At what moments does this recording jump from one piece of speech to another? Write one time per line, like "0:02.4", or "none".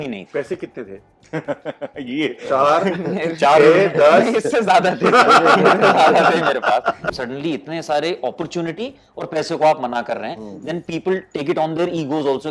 0:07.1

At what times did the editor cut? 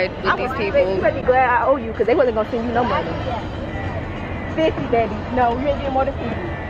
none

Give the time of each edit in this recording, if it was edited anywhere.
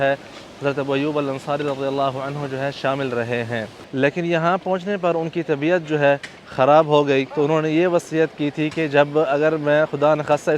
0:03.8
0:07.3

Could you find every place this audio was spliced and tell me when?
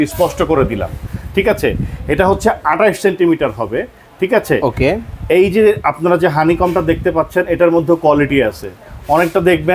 none

